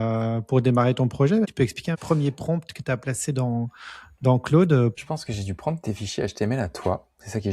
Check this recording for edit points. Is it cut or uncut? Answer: cut